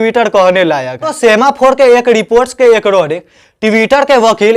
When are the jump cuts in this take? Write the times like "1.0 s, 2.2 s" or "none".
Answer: 1.1 s